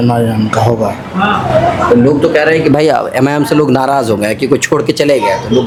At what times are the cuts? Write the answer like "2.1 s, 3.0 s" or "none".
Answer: none